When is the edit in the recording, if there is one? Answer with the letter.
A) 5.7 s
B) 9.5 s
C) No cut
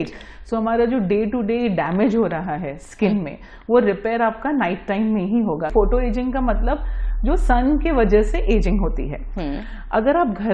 A